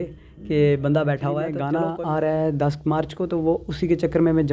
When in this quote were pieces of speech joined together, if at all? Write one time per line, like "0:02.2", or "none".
0:01.5

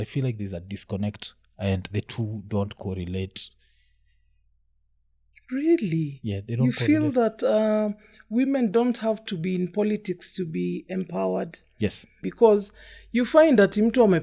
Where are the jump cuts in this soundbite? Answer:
0:12.2

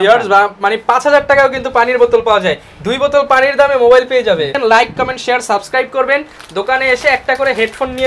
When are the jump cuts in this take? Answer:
0:04.6

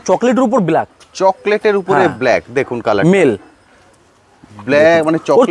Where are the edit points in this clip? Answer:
none

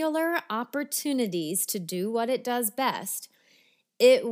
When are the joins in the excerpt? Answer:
none

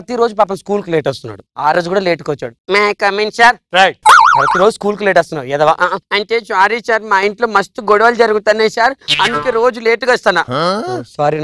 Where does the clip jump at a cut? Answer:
none

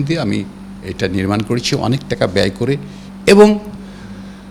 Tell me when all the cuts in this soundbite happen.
none

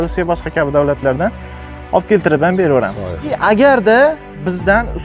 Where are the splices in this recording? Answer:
0:03.3

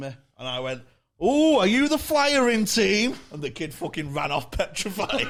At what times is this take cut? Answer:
none

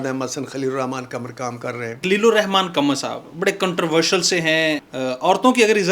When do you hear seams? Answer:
0:02.0
0:04.9

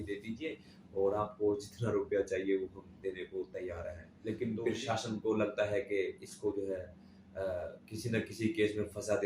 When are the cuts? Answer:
0:04.1

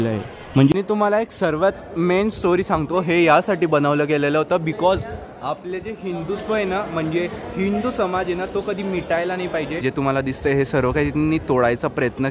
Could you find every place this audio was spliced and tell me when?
0:00.7
0:09.8

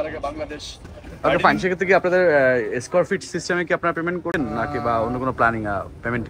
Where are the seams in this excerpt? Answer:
0:01.3
0:04.3

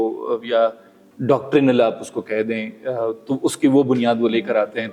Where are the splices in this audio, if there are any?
none

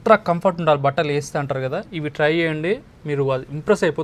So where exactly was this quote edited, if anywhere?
none

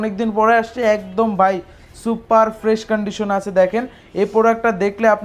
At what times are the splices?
none

